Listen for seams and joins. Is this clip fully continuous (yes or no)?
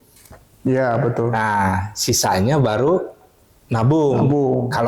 yes